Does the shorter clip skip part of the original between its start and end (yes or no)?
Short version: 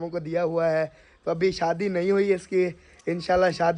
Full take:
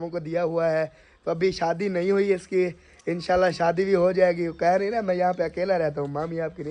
no